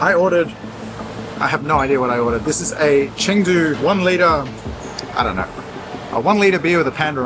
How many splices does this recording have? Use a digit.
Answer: 1